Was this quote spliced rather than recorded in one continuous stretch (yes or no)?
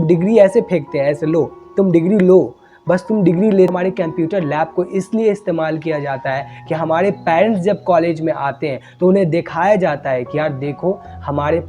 yes